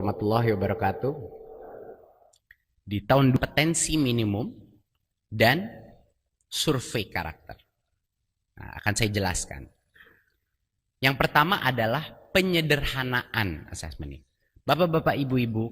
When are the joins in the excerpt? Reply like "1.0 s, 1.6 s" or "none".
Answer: 3.4 s